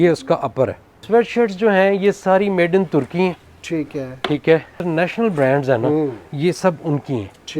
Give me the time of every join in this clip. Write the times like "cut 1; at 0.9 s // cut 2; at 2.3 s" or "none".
cut 1; at 0.9 s // cut 2; at 4.7 s